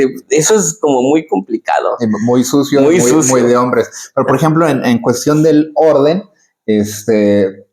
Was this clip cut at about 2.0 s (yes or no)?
no